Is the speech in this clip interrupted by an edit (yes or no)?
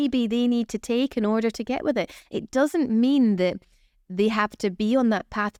no